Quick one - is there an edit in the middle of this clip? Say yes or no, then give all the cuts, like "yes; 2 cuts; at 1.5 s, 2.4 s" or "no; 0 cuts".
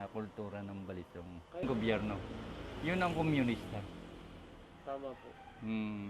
no; 0 cuts